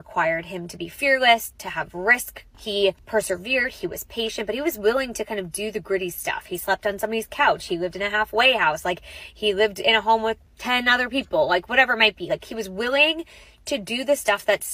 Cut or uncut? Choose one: uncut